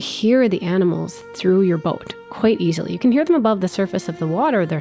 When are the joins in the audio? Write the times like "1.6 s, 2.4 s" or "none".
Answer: none